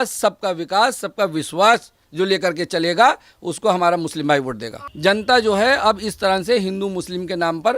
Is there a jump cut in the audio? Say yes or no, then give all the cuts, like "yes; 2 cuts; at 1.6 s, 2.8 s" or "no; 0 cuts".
yes; 1 cut; at 4.9 s